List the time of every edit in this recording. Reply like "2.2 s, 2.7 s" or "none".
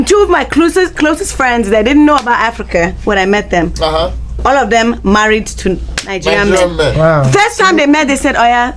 none